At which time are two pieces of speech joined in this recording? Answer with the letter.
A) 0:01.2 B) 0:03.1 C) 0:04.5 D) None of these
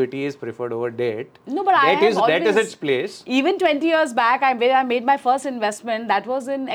D